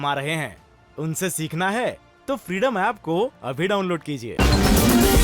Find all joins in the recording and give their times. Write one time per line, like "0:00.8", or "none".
0:04.2